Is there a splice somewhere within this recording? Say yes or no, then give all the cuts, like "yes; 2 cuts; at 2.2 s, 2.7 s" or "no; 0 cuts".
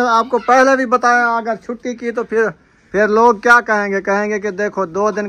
yes; 1 cut; at 2.6 s